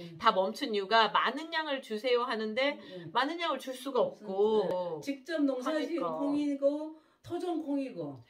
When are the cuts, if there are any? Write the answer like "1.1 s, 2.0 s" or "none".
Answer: 4.7 s